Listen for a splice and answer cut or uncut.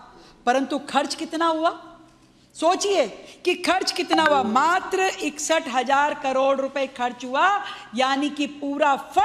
cut